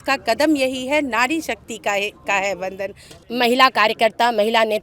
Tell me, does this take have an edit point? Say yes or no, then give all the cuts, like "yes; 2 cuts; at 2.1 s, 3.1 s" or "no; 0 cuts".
yes; 1 cut; at 3.1 s